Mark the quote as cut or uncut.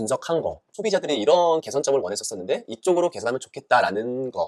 uncut